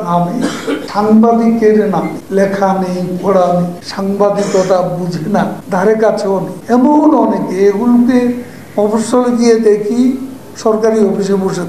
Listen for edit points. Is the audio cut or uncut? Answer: cut